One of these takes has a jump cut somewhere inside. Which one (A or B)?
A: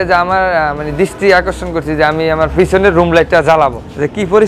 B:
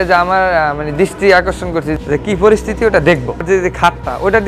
B